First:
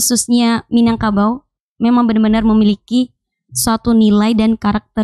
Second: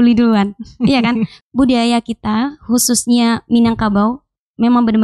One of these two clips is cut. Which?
second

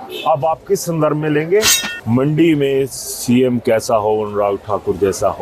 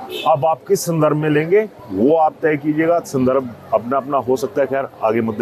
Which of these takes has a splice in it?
first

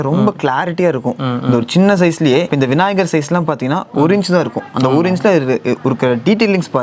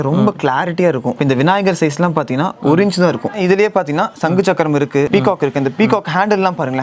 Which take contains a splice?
second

